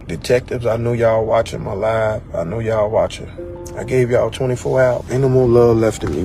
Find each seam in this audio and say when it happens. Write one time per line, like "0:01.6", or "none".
0:05.0